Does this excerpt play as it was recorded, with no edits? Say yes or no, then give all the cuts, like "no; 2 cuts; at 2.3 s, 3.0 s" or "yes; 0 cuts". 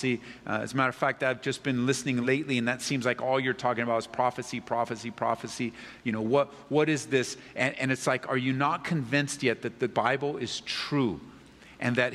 no; 2 cuts; at 2.2 s, 9.9 s